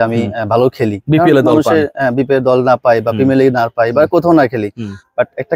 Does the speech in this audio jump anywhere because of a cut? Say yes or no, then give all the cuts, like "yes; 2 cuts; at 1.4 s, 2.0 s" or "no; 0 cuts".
no; 0 cuts